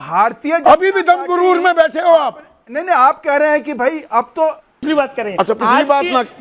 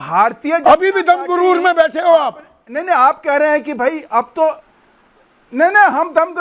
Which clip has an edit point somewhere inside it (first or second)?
first